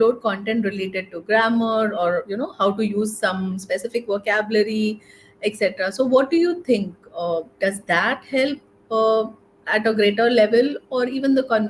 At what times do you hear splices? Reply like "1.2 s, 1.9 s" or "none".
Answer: none